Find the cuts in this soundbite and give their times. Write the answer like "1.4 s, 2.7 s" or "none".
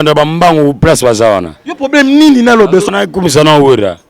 2.9 s